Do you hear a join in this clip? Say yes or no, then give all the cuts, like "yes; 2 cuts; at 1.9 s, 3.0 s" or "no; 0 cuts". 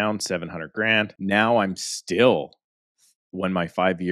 yes; 1 cut; at 1.1 s